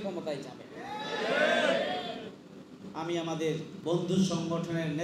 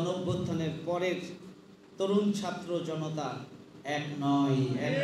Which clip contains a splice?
first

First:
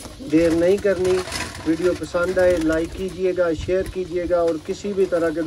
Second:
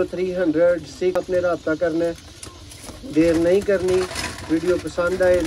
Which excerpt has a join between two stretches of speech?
second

